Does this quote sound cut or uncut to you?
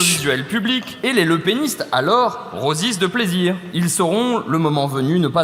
cut